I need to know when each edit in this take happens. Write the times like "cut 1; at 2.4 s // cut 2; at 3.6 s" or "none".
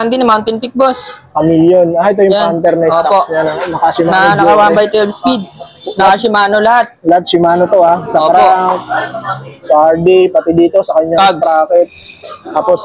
none